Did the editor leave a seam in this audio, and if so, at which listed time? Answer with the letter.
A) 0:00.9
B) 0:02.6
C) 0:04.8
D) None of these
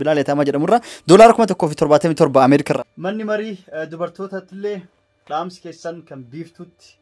B